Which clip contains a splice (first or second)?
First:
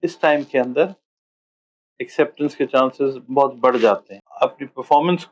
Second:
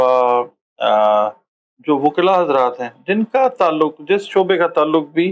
first